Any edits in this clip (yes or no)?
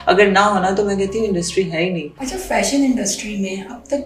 yes